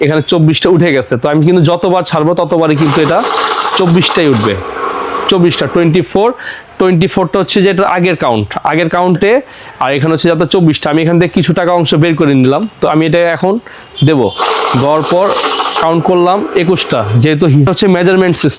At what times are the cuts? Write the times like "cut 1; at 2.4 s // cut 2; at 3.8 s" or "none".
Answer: cut 1; at 17.7 s